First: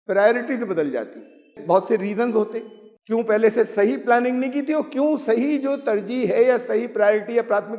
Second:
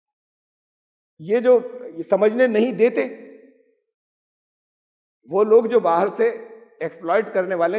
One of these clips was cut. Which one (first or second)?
first